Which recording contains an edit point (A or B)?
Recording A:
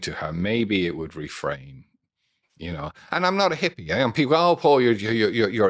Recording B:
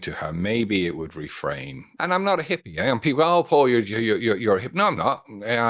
B